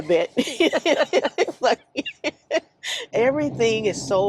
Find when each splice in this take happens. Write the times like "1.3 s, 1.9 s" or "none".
3.1 s